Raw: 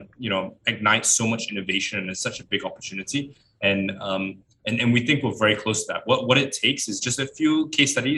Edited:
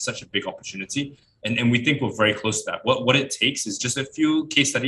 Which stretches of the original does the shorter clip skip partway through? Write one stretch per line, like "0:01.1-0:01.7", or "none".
0:03.4-0:04.5